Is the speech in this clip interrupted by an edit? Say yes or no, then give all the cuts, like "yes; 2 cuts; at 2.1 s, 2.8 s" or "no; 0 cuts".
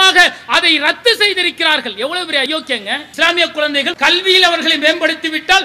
yes; 2 cuts; at 2.5 s, 3.9 s